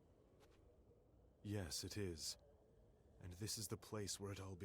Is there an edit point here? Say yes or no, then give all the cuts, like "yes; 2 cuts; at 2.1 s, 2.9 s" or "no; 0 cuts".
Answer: yes; 1 cut; at 1.3 s